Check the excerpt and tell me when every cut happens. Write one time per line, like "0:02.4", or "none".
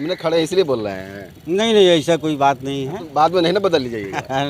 0:03.1

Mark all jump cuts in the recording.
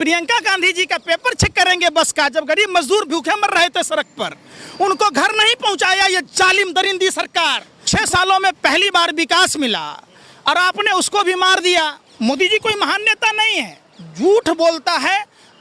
0:07.7
0:12.0

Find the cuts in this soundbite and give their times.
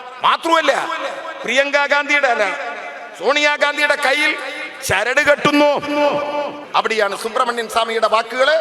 0:06.6

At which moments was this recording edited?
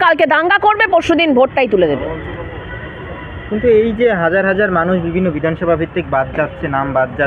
none

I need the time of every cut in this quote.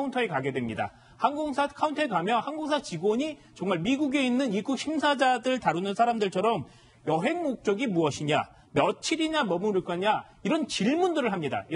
0:10.3

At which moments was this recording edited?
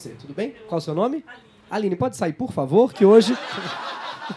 none

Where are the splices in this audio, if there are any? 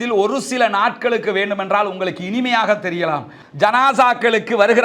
0:03.4

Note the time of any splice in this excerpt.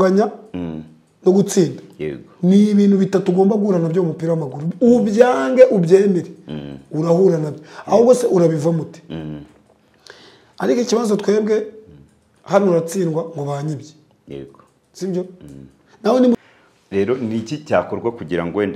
0:16.4

